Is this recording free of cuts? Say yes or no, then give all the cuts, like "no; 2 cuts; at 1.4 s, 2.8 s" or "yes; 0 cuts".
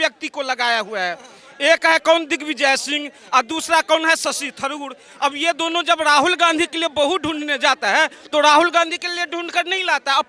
yes; 0 cuts